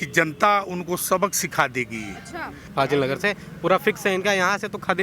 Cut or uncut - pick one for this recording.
cut